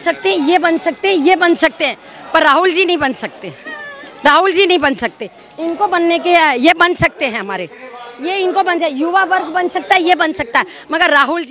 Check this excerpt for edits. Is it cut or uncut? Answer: uncut